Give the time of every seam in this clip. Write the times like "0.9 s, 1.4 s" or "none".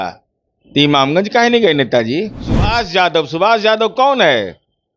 2.7 s